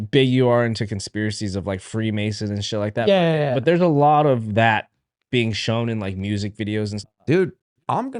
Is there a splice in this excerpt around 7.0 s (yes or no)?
yes